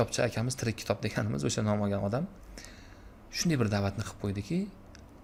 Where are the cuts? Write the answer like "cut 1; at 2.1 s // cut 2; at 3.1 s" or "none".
none